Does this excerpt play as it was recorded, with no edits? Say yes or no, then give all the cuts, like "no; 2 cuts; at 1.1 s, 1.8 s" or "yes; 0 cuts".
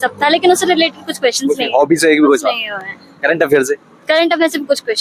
yes; 0 cuts